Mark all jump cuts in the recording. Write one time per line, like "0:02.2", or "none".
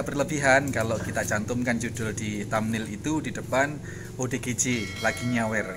none